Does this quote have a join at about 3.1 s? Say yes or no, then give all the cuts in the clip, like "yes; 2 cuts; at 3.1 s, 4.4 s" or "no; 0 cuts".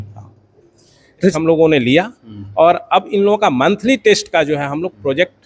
no; 1 cut; at 1.3 s